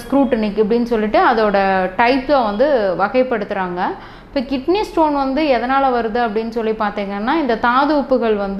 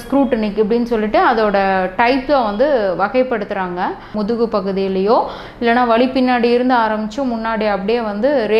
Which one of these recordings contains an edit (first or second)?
second